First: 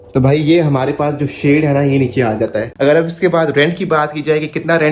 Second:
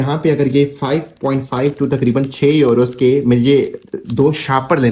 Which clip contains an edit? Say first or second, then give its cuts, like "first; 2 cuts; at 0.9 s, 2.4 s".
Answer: first; 1 cut; at 2.6 s